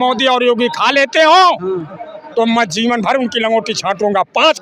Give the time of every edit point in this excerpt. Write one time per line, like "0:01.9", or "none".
none